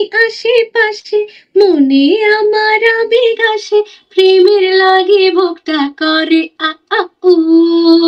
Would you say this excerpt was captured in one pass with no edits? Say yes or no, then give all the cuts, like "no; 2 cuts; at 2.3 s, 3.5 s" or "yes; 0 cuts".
yes; 0 cuts